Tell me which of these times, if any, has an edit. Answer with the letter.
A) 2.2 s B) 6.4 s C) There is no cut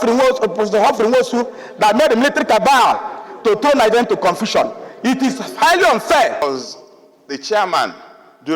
B